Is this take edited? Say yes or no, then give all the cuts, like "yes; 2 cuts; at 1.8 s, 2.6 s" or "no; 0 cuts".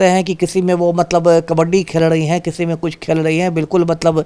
no; 0 cuts